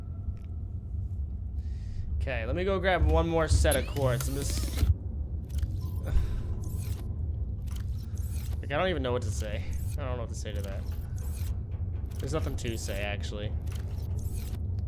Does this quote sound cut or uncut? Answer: cut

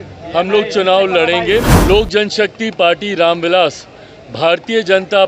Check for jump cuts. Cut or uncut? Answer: cut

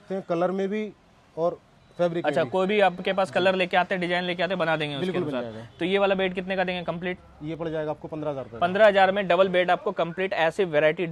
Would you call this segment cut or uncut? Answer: uncut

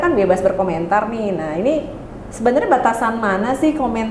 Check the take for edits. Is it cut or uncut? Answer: uncut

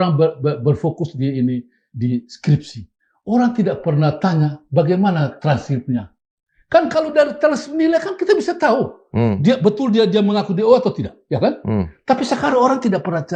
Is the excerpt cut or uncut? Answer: uncut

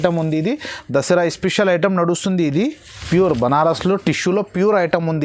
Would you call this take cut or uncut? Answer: cut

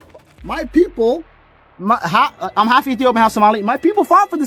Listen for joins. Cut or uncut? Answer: uncut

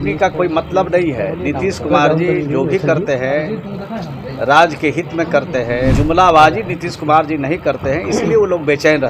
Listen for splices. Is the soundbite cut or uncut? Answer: cut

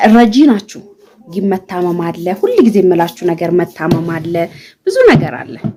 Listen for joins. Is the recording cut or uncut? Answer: uncut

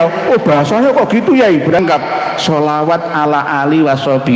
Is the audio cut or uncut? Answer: cut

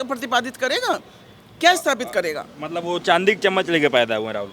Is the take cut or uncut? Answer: uncut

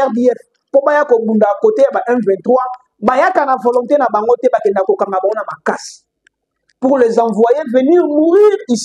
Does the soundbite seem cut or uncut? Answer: uncut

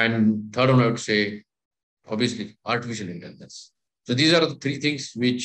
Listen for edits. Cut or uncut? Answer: uncut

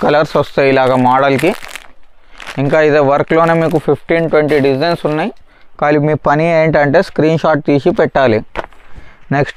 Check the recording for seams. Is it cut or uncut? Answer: uncut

